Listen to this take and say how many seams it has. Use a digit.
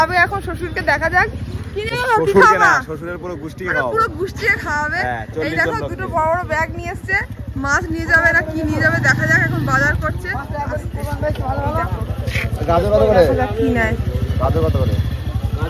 0